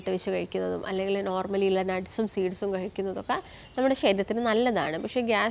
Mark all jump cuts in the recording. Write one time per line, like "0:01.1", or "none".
none